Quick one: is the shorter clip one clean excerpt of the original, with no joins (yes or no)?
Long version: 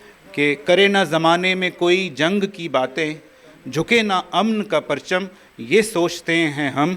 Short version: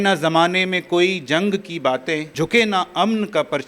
no